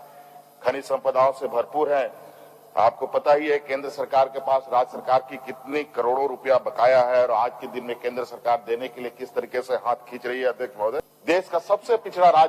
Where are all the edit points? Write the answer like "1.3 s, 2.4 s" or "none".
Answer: 11.1 s